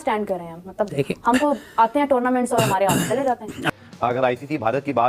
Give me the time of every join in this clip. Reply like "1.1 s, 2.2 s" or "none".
3.7 s

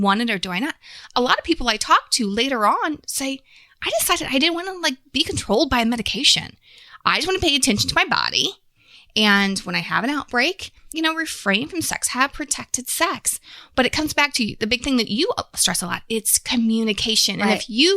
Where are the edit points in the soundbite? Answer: 10.8 s

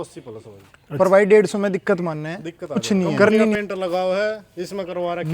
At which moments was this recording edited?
3.6 s

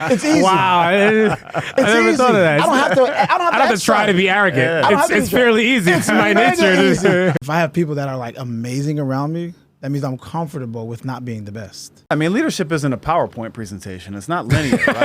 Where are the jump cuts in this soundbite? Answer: 7.4 s, 12.1 s

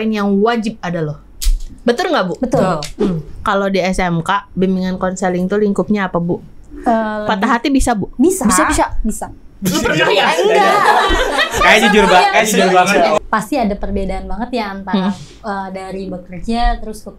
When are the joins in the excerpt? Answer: 3.3 s, 13.2 s

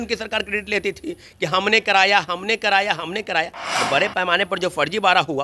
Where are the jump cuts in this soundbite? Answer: none

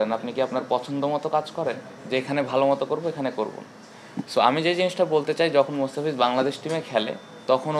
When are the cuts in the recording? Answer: none

